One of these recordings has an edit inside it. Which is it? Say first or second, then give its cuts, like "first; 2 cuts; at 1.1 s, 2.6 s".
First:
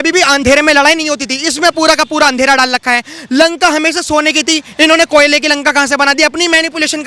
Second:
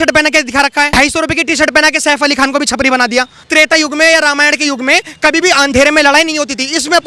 second; 2 cuts; at 0.9 s, 3.5 s